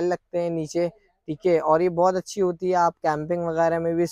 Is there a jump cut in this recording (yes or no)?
no